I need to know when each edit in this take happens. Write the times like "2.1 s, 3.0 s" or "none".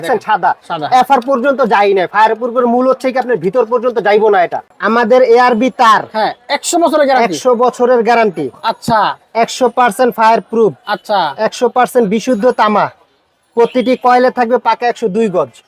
4.7 s

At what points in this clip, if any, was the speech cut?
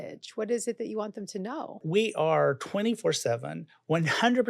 1.8 s

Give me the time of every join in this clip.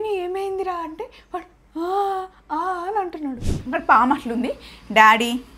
3.5 s

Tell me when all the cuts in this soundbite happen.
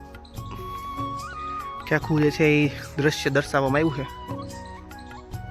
1.8 s, 4.1 s

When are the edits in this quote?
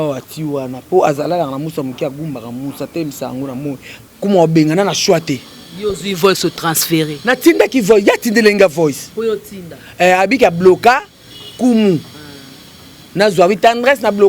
3.9 s

